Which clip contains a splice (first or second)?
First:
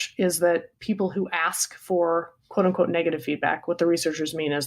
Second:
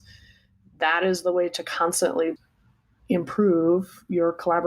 second